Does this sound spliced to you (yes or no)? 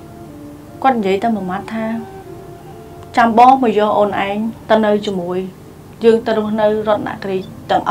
no